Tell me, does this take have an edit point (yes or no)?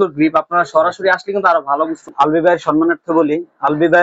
yes